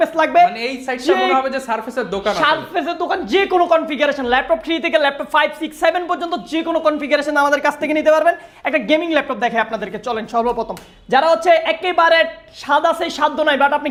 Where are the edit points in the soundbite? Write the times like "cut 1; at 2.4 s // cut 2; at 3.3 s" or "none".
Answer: none